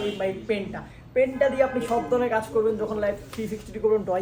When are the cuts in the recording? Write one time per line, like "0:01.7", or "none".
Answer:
none